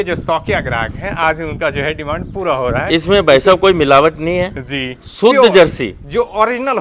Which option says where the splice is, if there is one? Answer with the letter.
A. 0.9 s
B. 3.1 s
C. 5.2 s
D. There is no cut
D